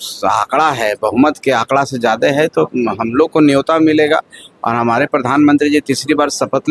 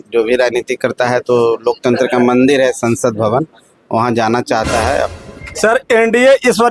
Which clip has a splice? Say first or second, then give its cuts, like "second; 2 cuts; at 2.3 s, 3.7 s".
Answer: second; 1 cut; at 5.1 s